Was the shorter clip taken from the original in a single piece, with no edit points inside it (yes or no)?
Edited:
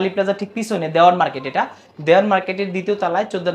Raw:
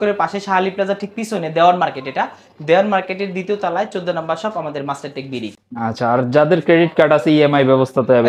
yes